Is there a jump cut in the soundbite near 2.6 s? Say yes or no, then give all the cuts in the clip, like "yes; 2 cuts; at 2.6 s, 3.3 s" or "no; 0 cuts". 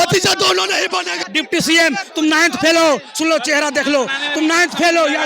no; 1 cut; at 1.2 s